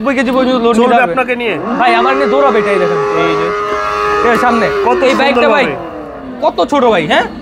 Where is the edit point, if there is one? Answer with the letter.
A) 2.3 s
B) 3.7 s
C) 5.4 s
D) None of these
D